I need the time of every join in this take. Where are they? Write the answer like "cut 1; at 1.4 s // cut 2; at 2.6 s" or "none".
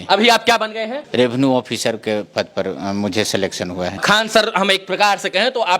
cut 1; at 1.0 s // cut 2; at 4.0 s